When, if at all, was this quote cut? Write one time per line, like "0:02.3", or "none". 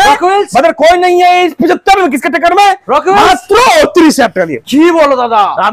none